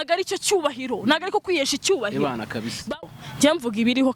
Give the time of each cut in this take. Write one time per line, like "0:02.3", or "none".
0:03.0